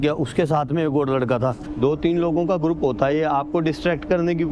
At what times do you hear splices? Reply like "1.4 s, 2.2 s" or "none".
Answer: 1.6 s